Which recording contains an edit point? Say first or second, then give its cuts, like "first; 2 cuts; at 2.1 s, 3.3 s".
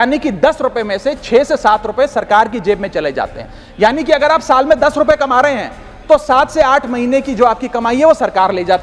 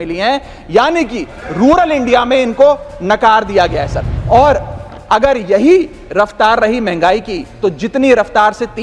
second; 1 cut; at 4.1 s